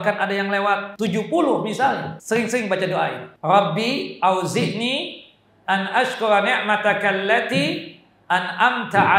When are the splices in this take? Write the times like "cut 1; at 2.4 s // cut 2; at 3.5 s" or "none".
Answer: cut 1; at 0.9 s // cut 2; at 2.1 s // cut 3; at 3.3 s